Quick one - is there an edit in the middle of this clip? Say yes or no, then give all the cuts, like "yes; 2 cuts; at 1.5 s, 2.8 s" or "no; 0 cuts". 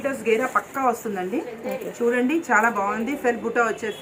no; 0 cuts